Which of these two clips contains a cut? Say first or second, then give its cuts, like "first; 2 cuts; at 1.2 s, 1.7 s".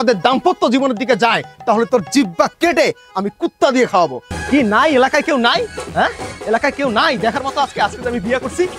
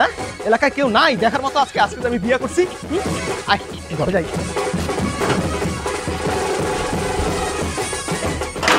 first; 1 cut; at 4.3 s